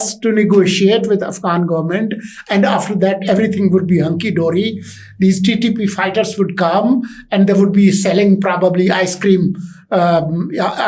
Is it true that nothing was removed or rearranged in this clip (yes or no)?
yes